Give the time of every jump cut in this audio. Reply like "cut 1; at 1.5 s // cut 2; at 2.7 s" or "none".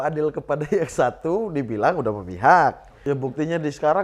cut 1; at 2.9 s